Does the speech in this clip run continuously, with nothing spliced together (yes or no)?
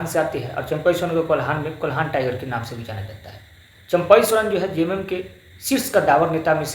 yes